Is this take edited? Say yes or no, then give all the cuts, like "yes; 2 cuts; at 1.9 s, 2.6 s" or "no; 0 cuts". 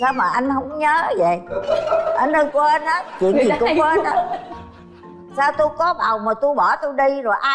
no; 0 cuts